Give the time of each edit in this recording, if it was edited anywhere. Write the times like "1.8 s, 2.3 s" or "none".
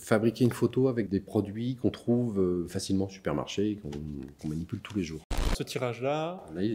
1.1 s, 5.5 s